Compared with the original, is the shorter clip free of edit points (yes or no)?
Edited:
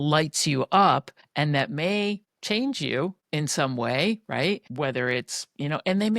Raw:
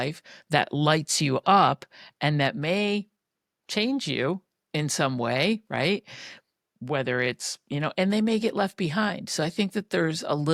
no